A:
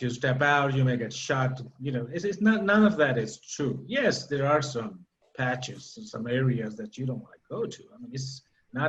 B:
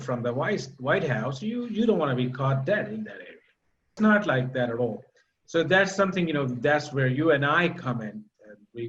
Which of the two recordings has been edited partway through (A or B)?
B